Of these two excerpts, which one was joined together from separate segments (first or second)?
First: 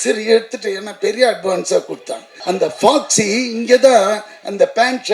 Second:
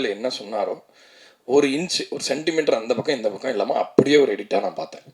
first